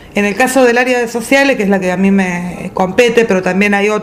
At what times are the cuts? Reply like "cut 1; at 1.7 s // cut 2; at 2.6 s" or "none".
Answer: none